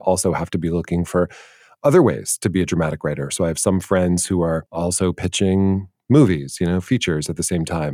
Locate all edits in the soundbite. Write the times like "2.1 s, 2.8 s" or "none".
4.7 s